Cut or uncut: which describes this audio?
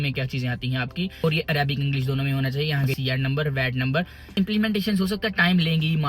cut